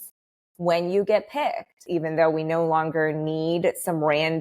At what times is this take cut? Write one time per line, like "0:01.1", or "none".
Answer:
0:01.7